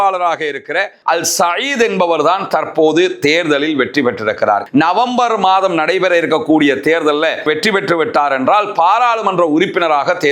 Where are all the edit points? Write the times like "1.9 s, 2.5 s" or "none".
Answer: 0.9 s, 4.6 s, 7.4 s